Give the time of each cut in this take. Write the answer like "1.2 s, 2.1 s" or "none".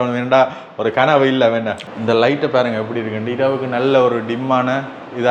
1.9 s